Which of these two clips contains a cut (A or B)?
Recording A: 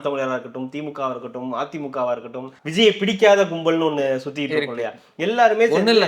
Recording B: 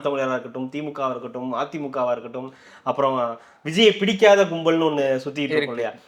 A